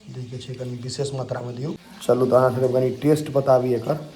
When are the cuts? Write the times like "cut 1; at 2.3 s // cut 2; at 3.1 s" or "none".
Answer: cut 1; at 1.9 s